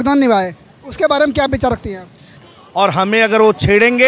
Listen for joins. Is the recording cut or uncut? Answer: cut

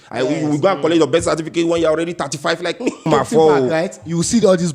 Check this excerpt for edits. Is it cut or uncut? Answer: cut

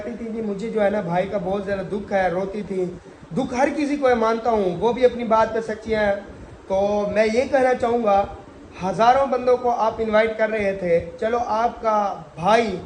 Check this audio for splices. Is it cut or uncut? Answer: uncut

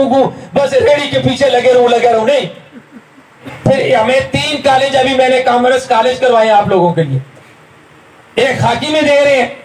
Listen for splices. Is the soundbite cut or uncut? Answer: cut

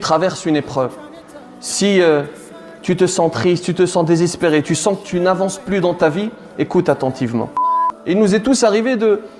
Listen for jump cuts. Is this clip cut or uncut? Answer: cut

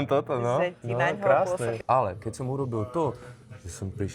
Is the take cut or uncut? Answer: cut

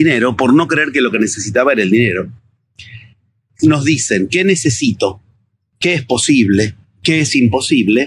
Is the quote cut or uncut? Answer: uncut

